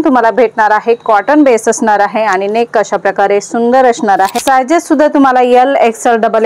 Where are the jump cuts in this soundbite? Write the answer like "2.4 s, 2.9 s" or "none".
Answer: 4.4 s